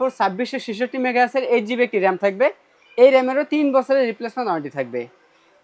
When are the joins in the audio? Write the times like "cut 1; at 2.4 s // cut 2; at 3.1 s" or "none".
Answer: none